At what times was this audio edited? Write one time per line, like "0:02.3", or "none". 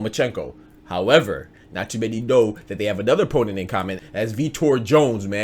0:04.0